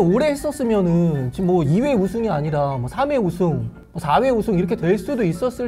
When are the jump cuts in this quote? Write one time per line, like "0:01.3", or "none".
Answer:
none